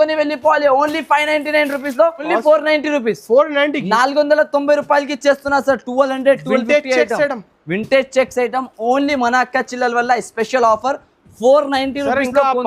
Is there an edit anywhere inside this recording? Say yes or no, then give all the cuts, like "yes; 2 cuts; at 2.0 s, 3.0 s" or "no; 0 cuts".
yes; 1 cut; at 2.3 s